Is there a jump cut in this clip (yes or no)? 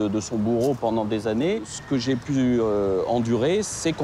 yes